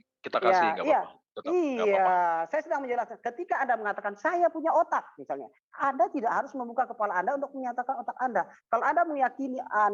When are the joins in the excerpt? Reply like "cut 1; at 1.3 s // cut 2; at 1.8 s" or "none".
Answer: none